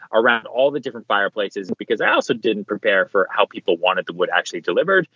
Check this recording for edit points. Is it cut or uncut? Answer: uncut